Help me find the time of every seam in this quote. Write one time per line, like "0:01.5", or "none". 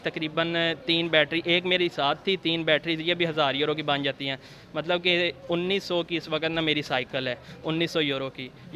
none